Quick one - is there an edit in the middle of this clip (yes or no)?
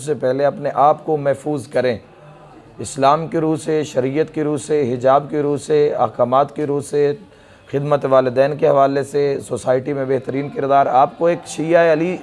no